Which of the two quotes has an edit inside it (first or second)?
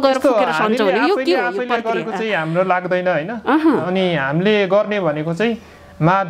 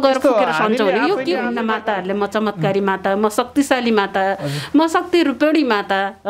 second